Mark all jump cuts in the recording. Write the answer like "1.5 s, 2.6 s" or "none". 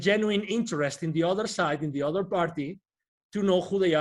none